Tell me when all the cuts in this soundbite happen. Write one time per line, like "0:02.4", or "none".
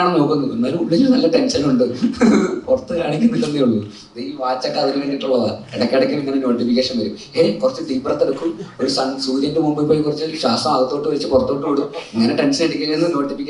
none